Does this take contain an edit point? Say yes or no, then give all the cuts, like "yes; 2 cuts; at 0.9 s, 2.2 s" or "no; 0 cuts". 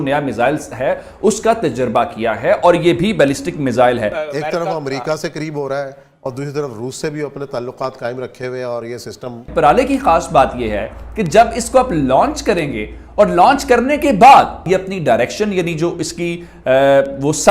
yes; 3 cuts; at 4.1 s, 9.4 s, 14.6 s